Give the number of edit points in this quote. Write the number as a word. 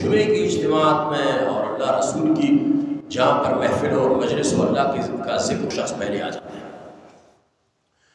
one